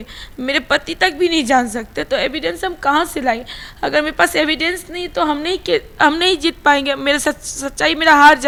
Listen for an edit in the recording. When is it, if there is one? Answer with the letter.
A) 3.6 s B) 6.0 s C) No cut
C